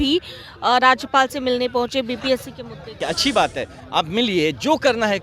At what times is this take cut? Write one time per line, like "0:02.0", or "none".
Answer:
0:03.0